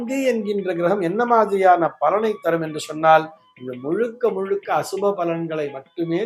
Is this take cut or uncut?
uncut